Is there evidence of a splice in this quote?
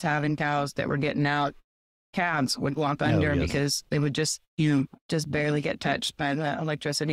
no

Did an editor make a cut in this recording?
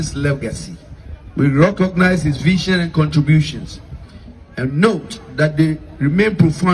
no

